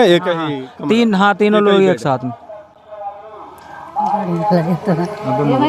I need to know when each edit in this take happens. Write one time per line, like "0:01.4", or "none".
none

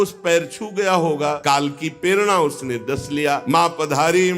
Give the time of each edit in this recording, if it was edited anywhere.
0:01.4
0:03.4

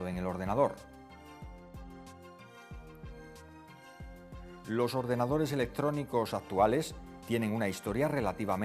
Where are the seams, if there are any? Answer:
0:07.2

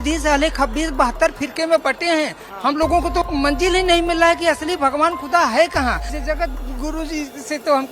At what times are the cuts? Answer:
0:03.3
0:06.1

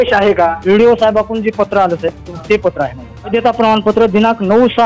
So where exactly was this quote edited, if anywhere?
0:03.3

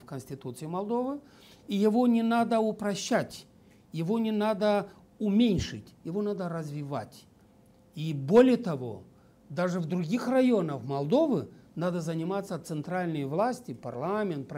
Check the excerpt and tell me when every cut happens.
none

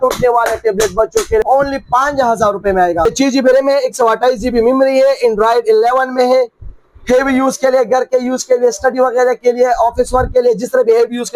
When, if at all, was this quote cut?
0:01.4
0:03.1

